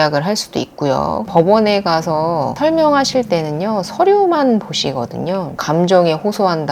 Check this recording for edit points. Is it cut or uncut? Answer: cut